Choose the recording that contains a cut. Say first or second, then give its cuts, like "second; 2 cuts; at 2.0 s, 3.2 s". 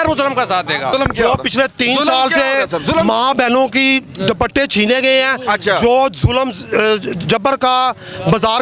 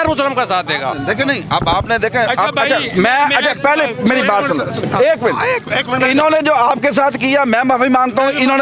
first; 1 cut; at 0.9 s